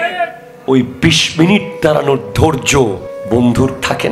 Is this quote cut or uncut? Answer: cut